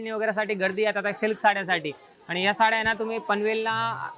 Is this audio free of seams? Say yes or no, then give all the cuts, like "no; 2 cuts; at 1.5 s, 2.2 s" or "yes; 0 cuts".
yes; 0 cuts